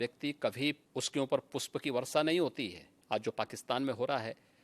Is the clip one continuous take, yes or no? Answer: no